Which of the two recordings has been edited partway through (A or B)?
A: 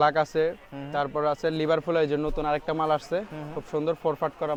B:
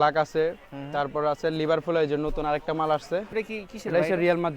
B